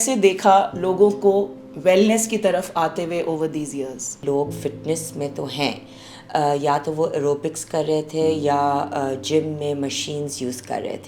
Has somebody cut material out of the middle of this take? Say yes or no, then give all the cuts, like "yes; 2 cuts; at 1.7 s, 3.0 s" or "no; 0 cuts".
yes; 1 cut; at 4.1 s